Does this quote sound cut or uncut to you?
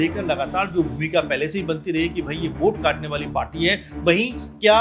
uncut